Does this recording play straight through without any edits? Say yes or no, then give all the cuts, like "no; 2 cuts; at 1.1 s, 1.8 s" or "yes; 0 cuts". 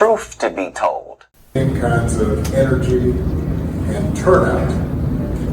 no; 1 cut; at 1.6 s